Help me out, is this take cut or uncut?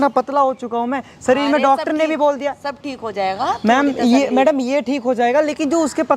uncut